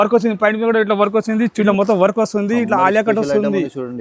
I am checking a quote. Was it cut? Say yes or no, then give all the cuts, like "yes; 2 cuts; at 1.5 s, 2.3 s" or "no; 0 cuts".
yes; 1 cut; at 1.7 s